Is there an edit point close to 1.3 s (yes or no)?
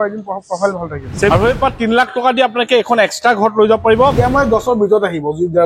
yes